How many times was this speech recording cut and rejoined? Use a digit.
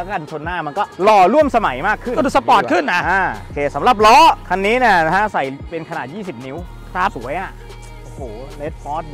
0